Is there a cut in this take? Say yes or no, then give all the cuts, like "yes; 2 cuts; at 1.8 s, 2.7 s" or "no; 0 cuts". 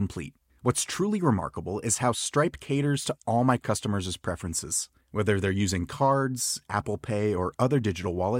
no; 0 cuts